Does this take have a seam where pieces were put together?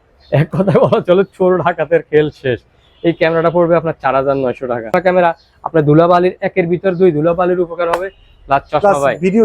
yes; 1 cut; at 4.9 s

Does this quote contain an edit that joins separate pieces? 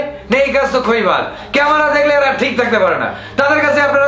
no; 0 cuts

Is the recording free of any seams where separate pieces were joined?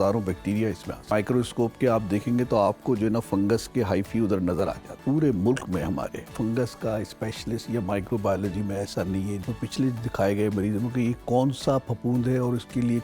no; 4 cuts; at 1.1 s, 5.0 s, 6.3 s, 9.5 s

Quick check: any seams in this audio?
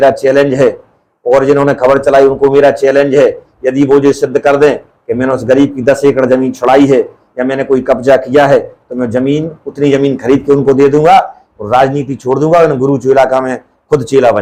no; 0 cuts

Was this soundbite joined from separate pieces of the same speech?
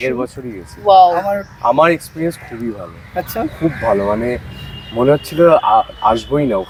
no; 0 cuts

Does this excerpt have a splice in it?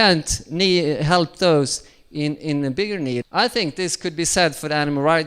yes; 1 cut; at 3.2 s

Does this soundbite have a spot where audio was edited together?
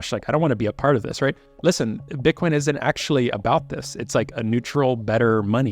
yes; 1 cut; at 1.5 s

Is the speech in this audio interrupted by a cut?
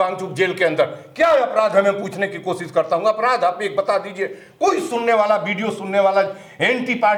no; 0 cuts

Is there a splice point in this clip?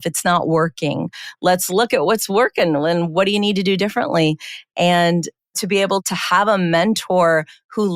yes; 1 cut; at 1.2 s

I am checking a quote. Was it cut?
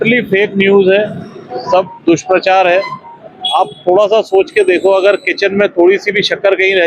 no; 0 cuts

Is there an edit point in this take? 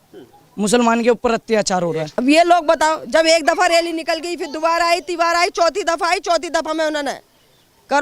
yes; 1 cut; at 2.1 s

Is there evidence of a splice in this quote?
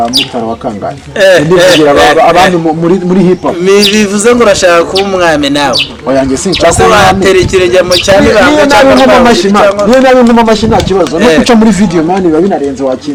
no; 0 cuts

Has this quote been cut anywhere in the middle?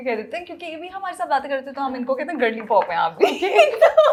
no; 0 cuts

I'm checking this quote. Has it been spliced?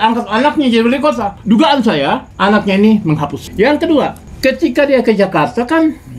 yes; 4 cuts; at 1.3 s, 2.3 s, 3.4 s, 4.2 s

